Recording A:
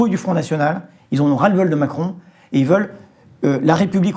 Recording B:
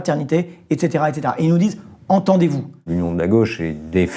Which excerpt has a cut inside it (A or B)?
B